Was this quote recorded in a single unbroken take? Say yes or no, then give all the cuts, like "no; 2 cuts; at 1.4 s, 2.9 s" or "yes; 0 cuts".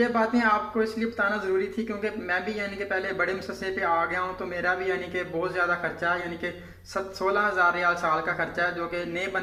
yes; 0 cuts